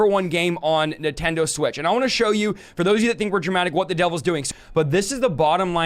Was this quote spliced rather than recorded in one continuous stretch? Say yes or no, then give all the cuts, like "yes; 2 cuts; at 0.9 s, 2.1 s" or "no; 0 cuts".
yes; 1 cut; at 4.5 s